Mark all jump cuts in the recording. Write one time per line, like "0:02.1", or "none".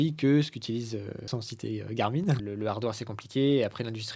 0:01.2
0:02.4